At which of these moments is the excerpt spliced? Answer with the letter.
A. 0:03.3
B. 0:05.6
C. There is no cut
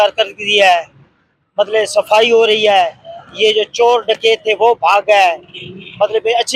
C